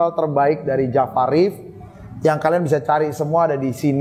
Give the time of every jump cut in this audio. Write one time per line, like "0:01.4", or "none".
none